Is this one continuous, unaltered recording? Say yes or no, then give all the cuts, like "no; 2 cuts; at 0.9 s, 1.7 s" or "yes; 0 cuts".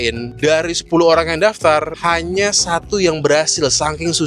yes; 0 cuts